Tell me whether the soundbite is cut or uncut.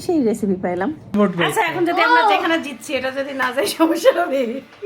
cut